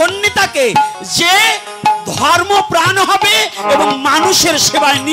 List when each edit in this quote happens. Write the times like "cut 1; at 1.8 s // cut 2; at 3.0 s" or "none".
none